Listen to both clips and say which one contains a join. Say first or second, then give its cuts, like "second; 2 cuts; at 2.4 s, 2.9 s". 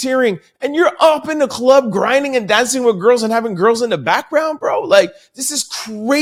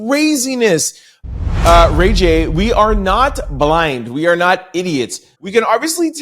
second; 2 cuts; at 1.6 s, 5.3 s